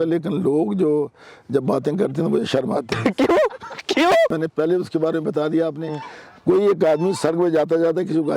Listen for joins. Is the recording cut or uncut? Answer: cut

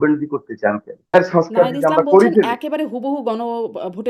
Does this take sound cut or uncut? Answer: cut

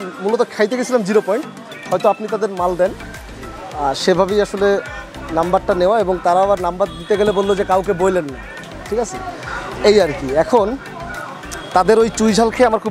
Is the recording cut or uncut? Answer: uncut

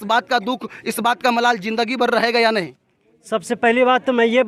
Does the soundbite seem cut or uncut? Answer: uncut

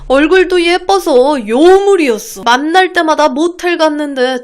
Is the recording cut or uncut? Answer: cut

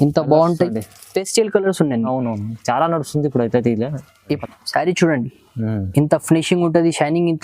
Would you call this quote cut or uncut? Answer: cut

